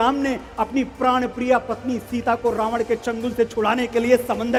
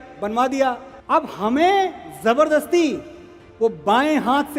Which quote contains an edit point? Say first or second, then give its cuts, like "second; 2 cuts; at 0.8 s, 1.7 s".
second; 1 cut; at 0.9 s